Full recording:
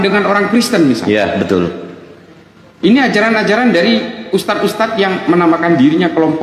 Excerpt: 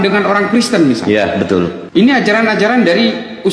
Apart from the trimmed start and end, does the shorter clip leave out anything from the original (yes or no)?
yes